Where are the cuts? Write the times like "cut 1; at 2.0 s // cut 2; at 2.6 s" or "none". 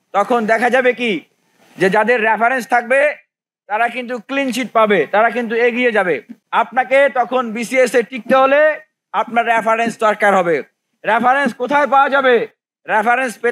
cut 1; at 6.3 s

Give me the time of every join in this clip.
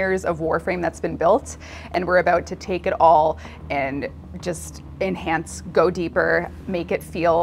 none

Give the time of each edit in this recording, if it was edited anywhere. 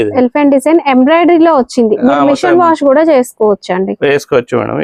none

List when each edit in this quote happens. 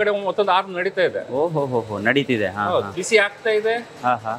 cut 1; at 3.0 s

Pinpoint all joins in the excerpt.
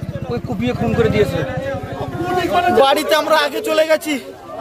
cut 1; at 2.1 s

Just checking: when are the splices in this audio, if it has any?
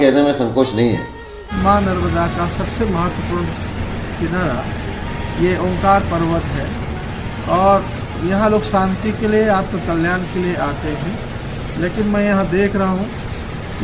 cut 1; at 1.5 s

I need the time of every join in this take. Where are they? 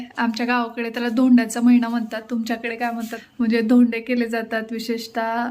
cut 1; at 3.2 s

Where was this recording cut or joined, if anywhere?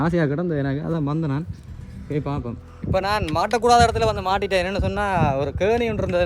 cut 1; at 2.7 s

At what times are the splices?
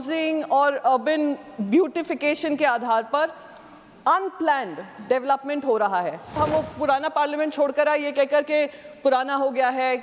cut 1; at 6.4 s

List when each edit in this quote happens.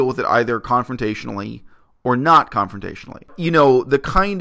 cut 1; at 3.4 s

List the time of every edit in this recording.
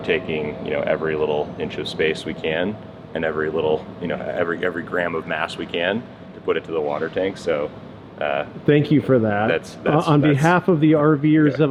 none

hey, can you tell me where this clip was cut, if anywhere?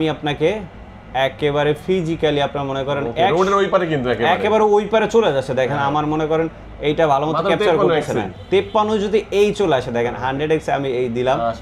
none

